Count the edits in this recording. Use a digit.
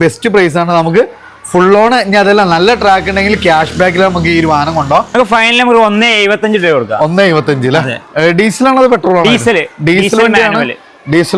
1